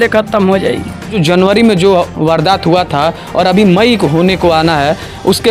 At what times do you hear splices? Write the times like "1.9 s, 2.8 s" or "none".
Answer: 1.2 s